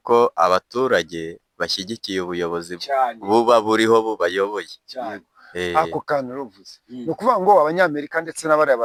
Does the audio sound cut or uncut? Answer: uncut